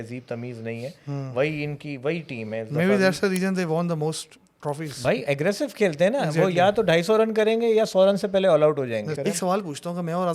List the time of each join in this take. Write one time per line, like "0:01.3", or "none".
0:09.1